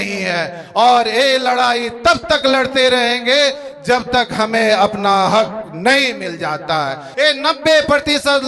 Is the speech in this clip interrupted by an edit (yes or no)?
yes